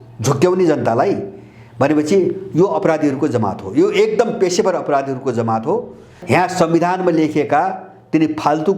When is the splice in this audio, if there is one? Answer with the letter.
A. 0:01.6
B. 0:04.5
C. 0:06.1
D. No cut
C